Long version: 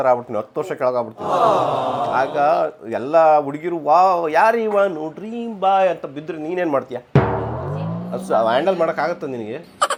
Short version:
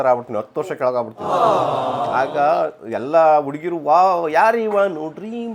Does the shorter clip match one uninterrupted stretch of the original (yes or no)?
yes